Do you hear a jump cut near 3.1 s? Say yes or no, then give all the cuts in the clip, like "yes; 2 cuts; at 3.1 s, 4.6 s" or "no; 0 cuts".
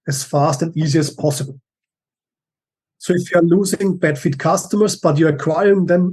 yes; 1 cut; at 3.1 s